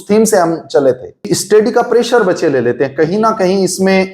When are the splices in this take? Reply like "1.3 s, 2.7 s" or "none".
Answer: 1.3 s

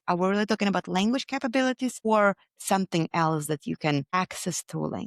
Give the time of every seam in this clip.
2.0 s, 4.1 s

